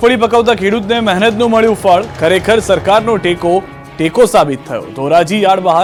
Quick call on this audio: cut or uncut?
uncut